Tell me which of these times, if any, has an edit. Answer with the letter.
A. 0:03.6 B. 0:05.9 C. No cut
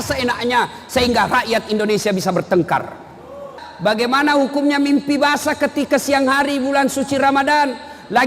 A